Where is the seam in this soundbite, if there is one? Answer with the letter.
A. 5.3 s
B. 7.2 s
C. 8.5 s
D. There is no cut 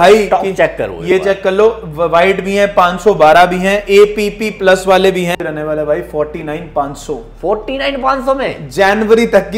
A